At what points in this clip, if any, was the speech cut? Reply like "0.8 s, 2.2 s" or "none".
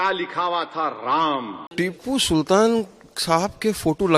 1.6 s